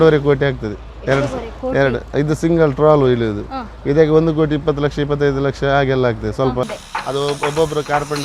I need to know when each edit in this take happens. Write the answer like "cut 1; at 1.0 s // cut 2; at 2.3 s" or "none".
cut 1; at 6.8 s